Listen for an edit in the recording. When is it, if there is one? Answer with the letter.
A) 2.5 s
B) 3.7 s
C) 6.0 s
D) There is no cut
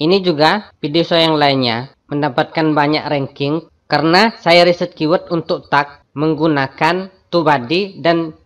B